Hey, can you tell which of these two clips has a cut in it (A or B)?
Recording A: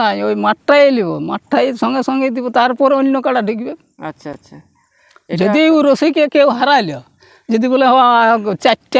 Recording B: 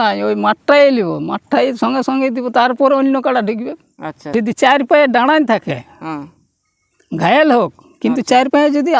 B